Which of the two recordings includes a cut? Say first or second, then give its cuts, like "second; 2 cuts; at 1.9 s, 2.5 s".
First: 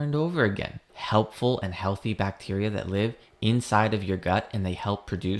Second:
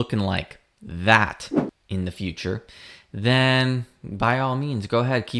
first; 1 cut; at 1.0 s